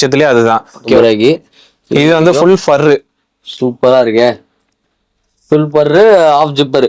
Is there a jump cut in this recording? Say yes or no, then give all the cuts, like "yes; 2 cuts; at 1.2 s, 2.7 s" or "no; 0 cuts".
yes; 1 cut; at 1.0 s